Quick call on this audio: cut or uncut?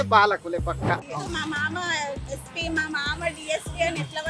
cut